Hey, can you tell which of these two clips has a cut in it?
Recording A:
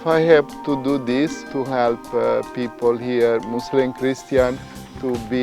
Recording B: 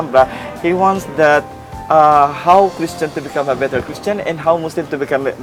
A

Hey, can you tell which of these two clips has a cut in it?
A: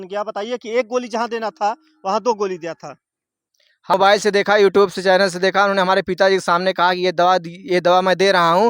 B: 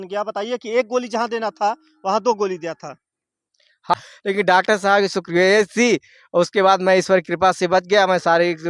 A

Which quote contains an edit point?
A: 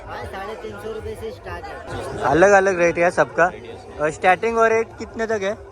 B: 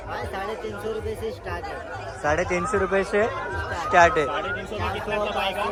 A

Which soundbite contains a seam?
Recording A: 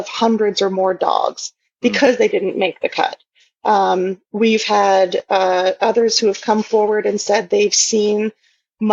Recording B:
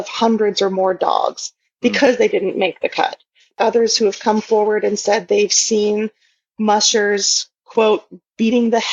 B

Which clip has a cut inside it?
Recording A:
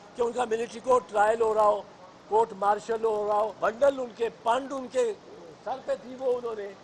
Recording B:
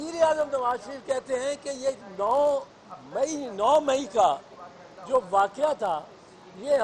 A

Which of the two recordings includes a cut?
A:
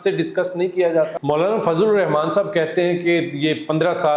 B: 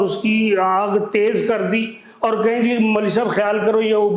A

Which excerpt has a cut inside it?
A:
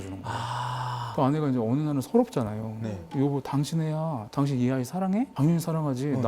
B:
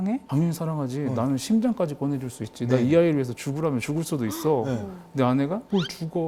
A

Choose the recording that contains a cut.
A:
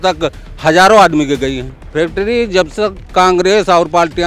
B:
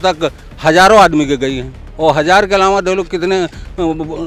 A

